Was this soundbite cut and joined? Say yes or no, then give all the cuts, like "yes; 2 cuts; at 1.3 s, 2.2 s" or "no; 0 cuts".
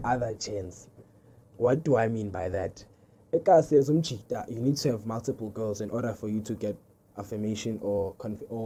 no; 0 cuts